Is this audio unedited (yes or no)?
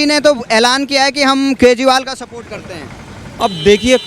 yes